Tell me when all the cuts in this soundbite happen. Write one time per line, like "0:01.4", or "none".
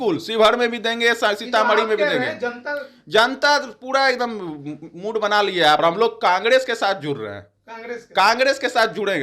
0:05.8